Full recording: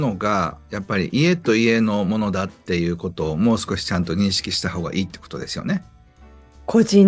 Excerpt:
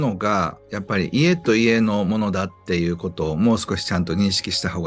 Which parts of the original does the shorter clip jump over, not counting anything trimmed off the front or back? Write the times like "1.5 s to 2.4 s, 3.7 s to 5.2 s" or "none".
none

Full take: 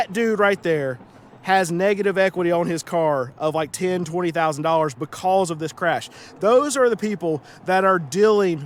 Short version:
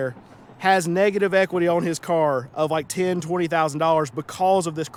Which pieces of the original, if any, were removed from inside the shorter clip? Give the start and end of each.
none

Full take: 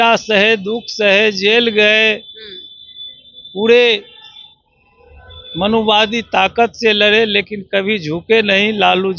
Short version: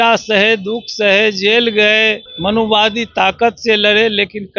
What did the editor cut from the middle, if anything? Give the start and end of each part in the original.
2.3 s to 5.4 s

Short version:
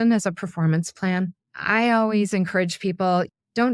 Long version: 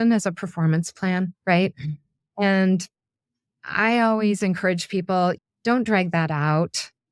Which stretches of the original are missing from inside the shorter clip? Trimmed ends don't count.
1.3 s to 3.4 s

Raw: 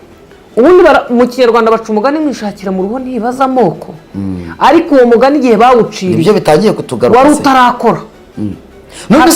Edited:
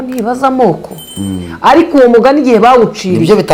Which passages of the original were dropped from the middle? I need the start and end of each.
none

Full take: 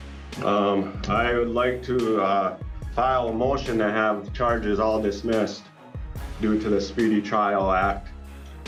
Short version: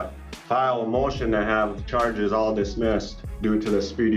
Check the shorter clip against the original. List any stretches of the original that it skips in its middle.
5.7 s to 6.2 s

